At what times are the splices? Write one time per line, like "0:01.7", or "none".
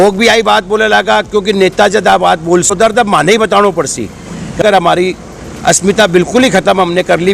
0:02.7
0:04.6